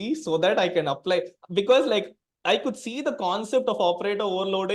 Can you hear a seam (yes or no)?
no